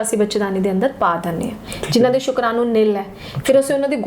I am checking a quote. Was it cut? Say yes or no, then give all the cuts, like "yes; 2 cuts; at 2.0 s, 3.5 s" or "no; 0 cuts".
yes; 1 cut; at 1.6 s